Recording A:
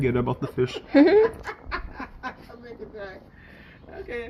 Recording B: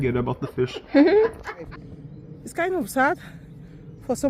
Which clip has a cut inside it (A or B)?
B